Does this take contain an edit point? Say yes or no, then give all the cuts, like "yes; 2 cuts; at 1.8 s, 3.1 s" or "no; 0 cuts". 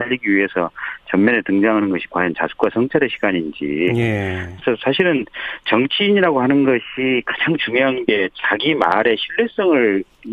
no; 0 cuts